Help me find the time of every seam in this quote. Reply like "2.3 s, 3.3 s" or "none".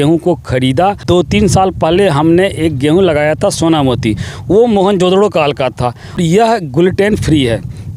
1.0 s, 6.2 s